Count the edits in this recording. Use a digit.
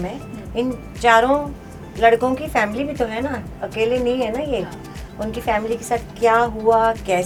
0